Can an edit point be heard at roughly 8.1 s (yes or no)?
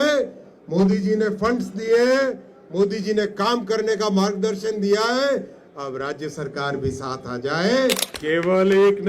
yes